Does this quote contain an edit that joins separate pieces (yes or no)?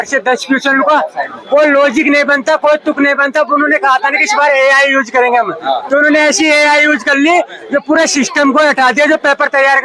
no